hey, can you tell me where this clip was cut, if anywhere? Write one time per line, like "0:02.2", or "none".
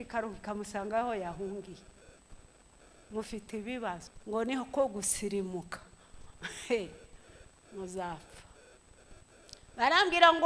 0:04.1